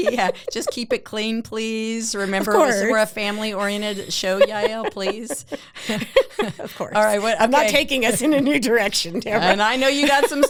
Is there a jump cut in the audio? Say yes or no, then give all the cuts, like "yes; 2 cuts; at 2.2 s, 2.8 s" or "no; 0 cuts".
no; 0 cuts